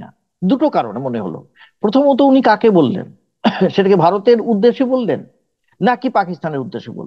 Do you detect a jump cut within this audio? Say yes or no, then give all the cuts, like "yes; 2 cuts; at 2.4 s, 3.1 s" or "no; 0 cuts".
no; 0 cuts